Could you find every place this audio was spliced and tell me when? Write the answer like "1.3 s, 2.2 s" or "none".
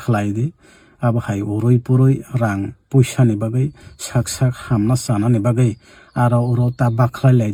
none